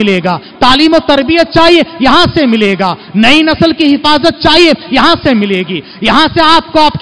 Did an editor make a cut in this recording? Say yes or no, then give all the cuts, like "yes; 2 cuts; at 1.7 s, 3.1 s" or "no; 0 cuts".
no; 0 cuts